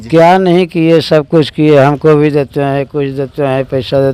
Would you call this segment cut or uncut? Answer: uncut